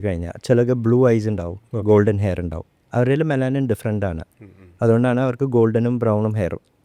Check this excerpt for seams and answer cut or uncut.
uncut